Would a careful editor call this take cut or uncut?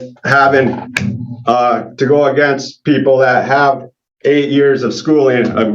uncut